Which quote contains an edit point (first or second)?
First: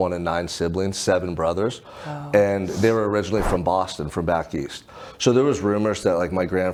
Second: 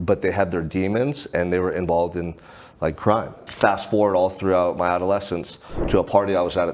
second